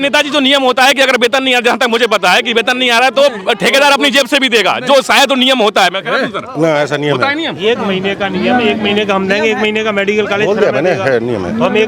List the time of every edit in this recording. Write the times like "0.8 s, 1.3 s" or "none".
none

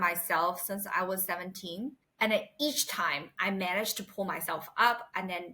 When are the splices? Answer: 2.0 s

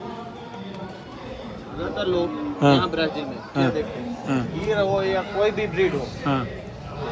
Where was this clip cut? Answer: none

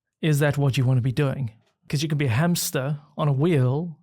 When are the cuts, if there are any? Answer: 1.8 s

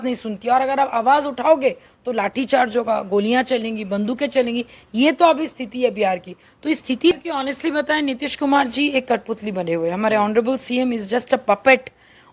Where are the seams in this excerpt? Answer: 7.2 s

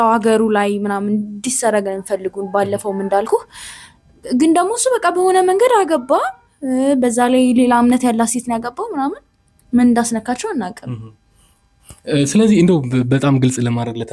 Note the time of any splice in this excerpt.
none

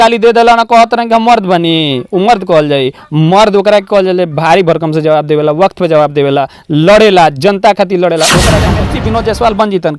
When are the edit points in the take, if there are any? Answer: 8.8 s

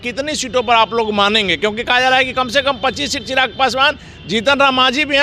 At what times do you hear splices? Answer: none

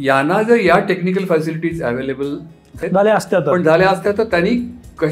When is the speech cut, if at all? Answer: 2.8 s

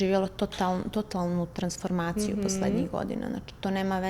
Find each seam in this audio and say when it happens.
none

